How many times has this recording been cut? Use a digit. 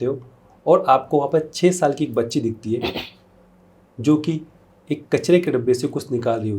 0